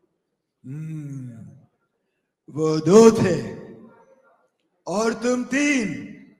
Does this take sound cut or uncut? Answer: uncut